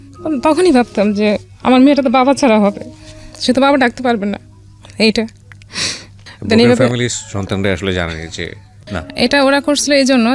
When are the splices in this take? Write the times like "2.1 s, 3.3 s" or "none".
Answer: 9.0 s